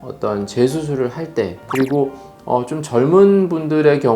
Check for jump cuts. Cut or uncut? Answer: cut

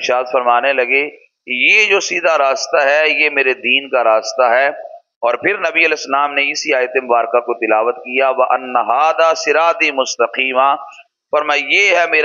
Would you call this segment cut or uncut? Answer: uncut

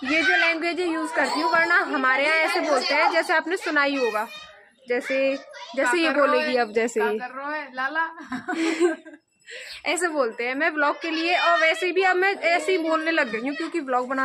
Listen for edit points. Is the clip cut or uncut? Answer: uncut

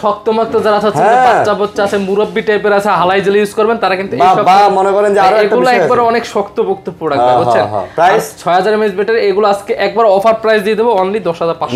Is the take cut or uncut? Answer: uncut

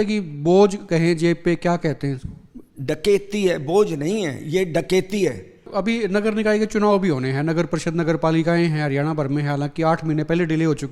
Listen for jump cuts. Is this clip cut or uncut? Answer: cut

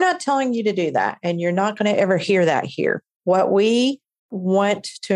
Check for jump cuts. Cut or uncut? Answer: uncut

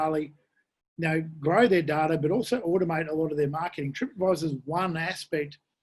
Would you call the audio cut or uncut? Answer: uncut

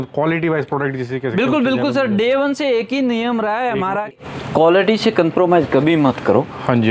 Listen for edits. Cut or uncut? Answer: uncut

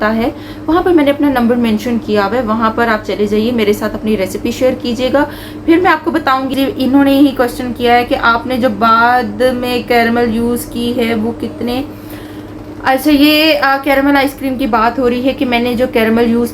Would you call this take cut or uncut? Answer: cut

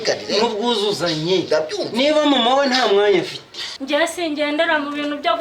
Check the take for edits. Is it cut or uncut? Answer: cut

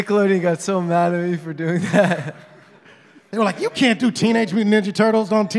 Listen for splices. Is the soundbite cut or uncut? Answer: uncut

